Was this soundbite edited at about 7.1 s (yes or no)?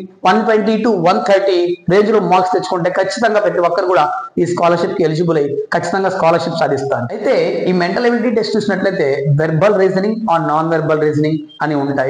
yes